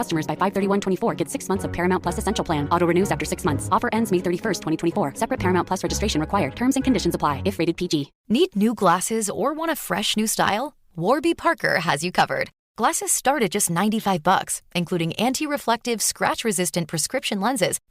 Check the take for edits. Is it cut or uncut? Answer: cut